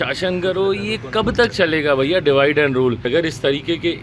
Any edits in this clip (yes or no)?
yes